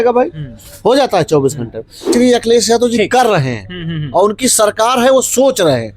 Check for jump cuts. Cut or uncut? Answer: cut